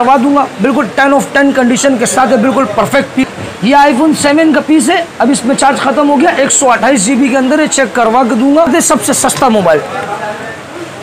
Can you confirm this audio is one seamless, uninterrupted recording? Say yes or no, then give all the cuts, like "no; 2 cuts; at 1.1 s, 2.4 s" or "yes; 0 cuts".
no; 2 cuts; at 3.3 s, 8.7 s